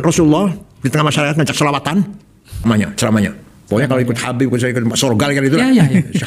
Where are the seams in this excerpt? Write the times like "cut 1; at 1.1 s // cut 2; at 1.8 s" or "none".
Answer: cut 1; at 2.6 s